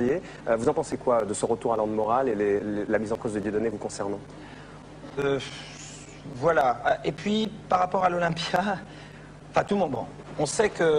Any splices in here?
no; 0 cuts

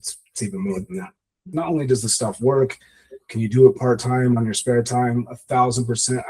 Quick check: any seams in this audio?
yes; 1 cut; at 1.5 s

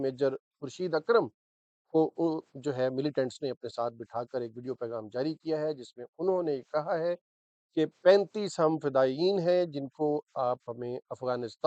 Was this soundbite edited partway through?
no; 0 cuts

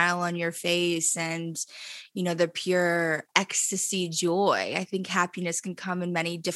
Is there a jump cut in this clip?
no; 0 cuts

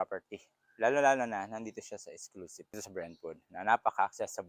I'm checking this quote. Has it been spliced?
yes; 1 cut; at 2.6 s

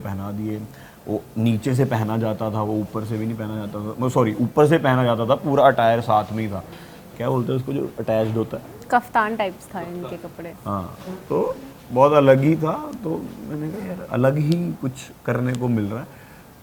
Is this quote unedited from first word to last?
yes; 0 cuts

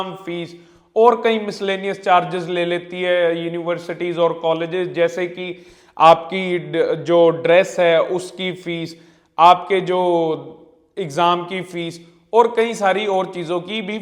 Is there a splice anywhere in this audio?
no; 0 cuts

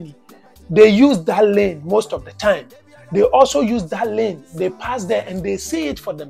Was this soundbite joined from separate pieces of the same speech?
no; 0 cuts

